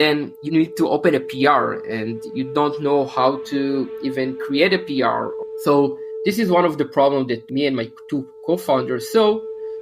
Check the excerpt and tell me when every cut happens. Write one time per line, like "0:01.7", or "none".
0:05.4

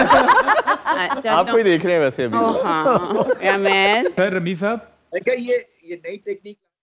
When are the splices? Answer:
0:04.2

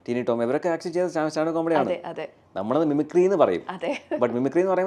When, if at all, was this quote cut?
none

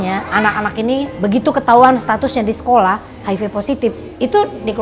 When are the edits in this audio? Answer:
0:01.1

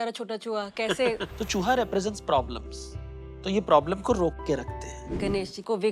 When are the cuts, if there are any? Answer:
0:01.3
0:05.2

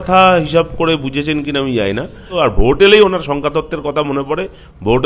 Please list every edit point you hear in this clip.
0:02.3

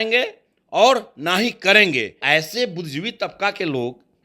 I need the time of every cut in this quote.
0:02.2

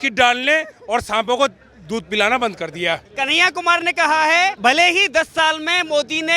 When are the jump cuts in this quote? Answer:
0:03.1
0:04.6

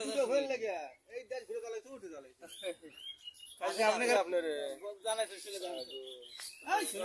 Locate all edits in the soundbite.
0:04.1

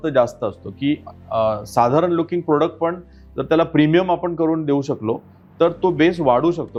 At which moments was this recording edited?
none

